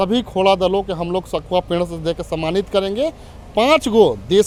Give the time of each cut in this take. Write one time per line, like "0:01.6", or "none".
none